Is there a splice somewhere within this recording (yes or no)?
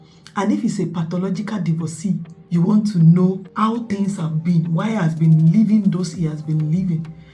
yes